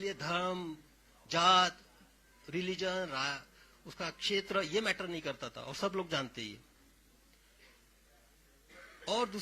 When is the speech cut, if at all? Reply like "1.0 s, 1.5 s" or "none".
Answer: none